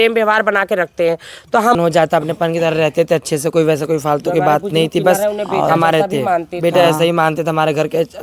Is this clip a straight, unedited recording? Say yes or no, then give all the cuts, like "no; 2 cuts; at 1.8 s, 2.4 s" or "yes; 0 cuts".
no; 1 cut; at 1.8 s